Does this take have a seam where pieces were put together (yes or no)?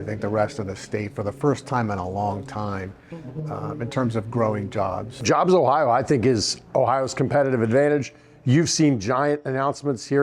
yes